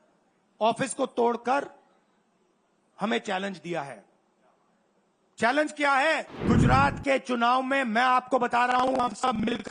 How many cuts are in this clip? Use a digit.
1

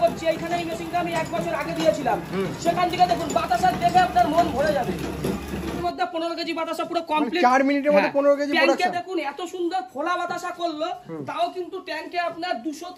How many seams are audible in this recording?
1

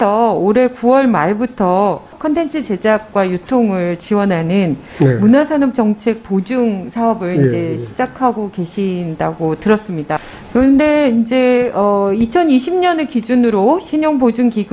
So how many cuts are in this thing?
1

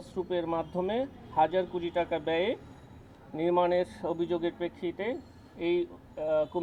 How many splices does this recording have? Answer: 0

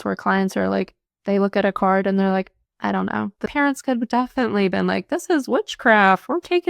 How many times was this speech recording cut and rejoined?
1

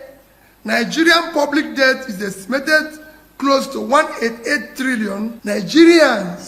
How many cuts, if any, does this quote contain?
1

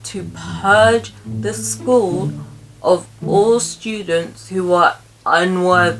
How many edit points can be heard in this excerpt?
0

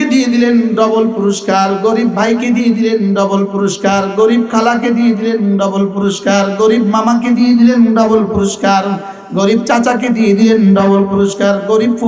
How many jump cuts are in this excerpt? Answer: 0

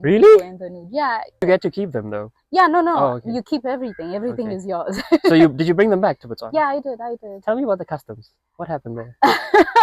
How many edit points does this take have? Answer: 1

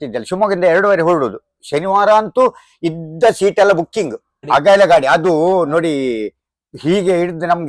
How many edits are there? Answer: 1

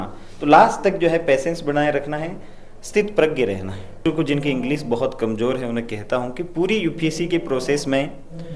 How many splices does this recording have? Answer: 1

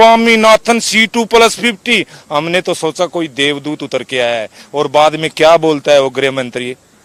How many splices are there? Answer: 0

